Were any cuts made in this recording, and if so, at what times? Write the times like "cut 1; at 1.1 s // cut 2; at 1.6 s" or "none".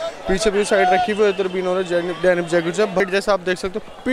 cut 1; at 3.0 s